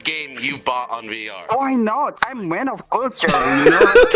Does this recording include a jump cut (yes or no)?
yes